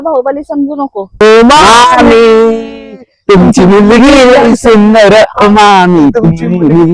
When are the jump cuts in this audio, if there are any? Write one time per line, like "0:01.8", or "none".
0:01.1